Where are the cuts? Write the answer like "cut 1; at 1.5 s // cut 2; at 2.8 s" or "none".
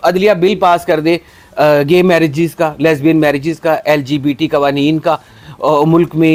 none